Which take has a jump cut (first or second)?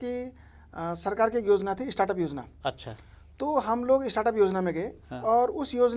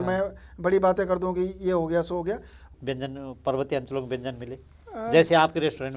second